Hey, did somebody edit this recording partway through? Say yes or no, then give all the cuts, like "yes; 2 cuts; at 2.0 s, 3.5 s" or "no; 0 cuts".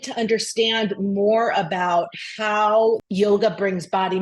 yes; 1 cut; at 3.0 s